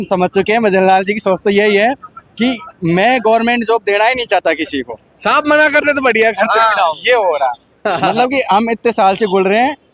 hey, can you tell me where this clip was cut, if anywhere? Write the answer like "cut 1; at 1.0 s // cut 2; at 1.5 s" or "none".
none